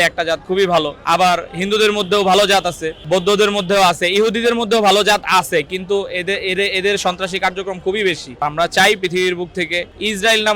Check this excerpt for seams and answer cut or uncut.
cut